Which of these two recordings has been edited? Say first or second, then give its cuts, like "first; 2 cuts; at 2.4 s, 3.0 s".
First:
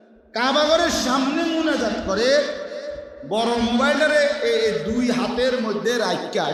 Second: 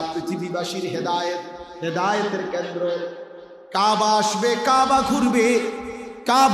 second; 1 cut; at 1.6 s